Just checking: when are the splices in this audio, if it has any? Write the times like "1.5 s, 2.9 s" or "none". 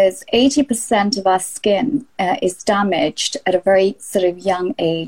none